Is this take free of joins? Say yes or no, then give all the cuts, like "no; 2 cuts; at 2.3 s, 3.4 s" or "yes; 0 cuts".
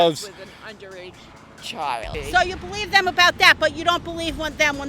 no; 1 cut; at 2.1 s